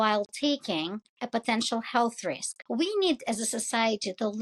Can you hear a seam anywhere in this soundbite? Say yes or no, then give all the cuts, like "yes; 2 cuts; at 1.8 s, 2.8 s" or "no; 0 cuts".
yes; 1 cut; at 2.5 s